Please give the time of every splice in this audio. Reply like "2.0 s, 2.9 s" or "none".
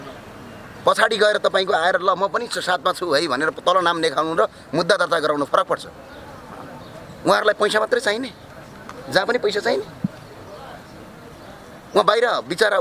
none